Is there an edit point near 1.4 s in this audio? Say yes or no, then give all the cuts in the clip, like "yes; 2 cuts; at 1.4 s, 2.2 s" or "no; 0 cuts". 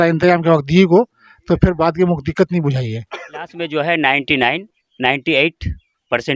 no; 1 cut; at 3.6 s